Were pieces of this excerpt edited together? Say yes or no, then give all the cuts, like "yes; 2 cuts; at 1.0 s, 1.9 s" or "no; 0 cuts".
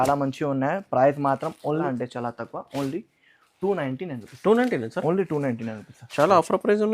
yes; 1 cut; at 1.8 s